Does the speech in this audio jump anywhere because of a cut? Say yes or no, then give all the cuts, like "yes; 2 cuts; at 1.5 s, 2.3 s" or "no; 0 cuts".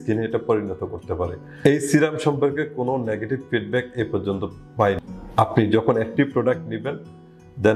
yes; 2 cuts; at 1.4 s, 5.0 s